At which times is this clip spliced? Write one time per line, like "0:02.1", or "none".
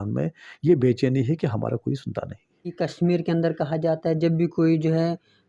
0:02.7